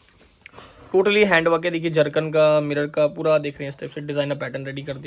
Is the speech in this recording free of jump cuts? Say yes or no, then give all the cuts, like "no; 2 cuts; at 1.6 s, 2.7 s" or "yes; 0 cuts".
yes; 0 cuts